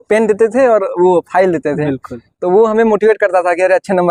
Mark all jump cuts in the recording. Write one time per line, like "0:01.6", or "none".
none